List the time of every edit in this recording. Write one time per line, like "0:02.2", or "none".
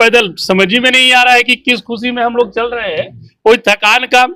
none